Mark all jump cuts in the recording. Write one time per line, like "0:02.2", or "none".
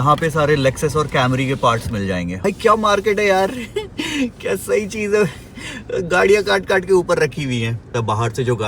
0:02.4
0:07.9